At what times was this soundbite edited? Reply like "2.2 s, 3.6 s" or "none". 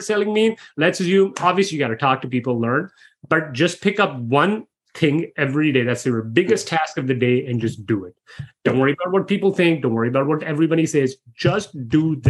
none